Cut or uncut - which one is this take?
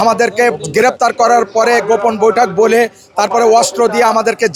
uncut